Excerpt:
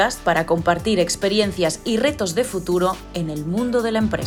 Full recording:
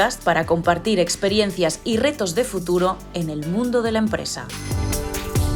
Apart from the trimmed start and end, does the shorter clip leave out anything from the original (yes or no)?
no